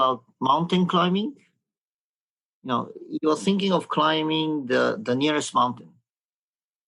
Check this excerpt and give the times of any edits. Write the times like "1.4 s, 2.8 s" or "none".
none